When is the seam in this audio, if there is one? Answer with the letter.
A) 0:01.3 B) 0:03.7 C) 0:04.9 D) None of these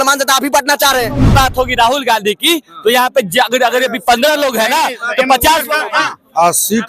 A